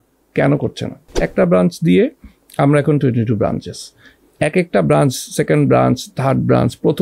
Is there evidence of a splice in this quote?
yes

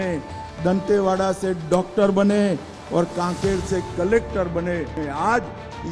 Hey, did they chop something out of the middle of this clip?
yes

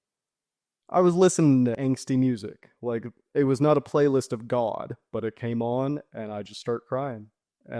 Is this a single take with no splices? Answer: no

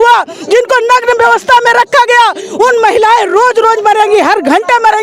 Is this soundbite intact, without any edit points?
yes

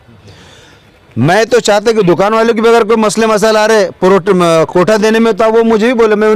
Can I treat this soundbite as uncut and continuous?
yes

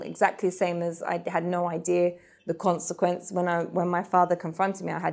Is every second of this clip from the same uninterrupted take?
yes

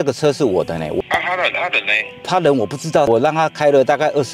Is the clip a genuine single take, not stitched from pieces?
no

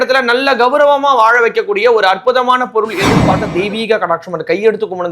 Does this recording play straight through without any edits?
no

